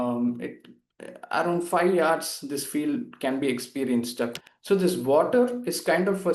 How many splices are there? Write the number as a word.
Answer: one